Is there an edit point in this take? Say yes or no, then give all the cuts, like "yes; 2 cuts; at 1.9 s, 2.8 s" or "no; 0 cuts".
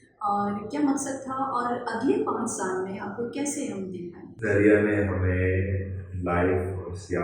yes; 1 cut; at 4.2 s